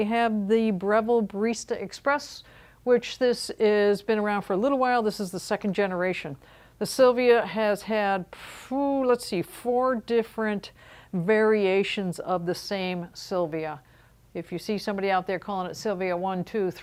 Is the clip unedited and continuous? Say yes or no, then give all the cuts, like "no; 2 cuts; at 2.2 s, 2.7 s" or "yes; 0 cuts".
yes; 0 cuts